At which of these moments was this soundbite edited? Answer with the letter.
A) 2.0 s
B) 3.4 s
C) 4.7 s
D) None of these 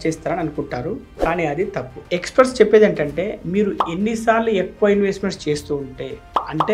A